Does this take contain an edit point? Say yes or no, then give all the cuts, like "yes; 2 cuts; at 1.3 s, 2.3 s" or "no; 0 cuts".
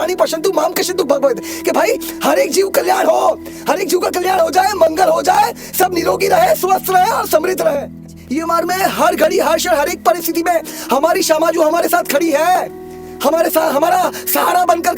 yes; 1 cut; at 8.1 s